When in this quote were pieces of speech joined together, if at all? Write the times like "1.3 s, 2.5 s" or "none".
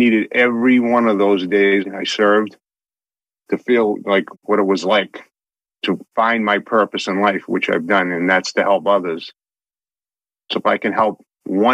1.8 s, 5.8 s